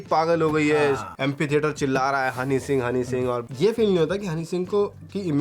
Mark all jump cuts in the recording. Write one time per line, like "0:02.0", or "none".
0:01.1
0:03.5